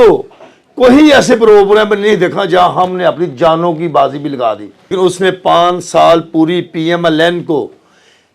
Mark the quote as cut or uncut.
cut